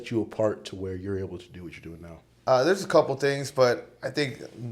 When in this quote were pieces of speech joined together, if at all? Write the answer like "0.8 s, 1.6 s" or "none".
2.2 s